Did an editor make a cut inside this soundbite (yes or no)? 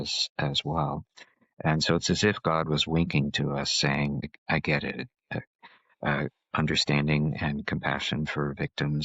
yes